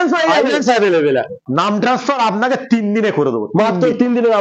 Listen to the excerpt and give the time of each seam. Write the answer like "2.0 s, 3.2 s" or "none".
1.4 s